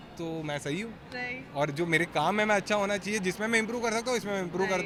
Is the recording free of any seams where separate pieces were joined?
yes; 0 cuts

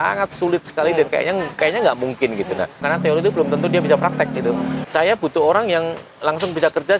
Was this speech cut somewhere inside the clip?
yes; 2 cuts; at 2.8 s, 4.8 s

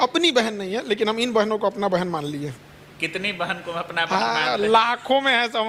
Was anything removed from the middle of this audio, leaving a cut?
no; 0 cuts

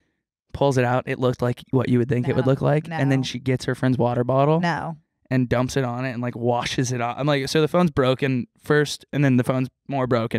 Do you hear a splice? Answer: no; 0 cuts

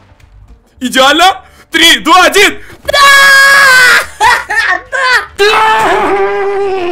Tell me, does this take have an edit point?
yes; 1 cut; at 5.3 s

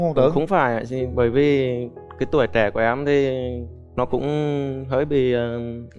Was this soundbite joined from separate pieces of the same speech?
no; 0 cuts

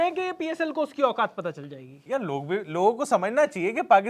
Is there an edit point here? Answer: no; 0 cuts

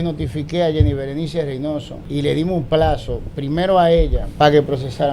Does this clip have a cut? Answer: yes; 2 cuts; at 2.0 s, 4.2 s

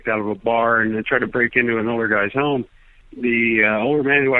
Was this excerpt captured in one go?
yes; 0 cuts

